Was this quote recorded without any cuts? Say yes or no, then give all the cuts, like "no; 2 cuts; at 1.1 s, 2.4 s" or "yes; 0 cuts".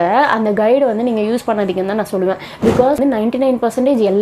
no; 1 cut; at 3.0 s